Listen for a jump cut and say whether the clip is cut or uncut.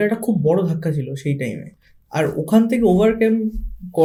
uncut